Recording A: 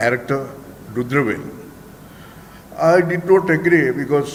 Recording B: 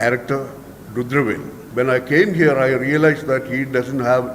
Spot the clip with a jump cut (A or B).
B